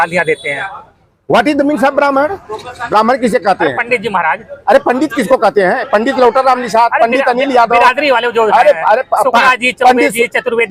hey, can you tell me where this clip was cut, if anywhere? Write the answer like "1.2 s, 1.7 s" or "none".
none